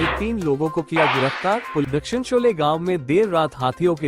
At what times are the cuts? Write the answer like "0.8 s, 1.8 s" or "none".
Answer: 1.9 s